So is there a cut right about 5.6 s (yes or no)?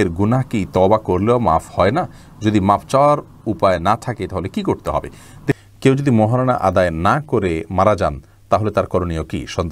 yes